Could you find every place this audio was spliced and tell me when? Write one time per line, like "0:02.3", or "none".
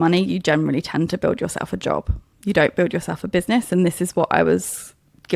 none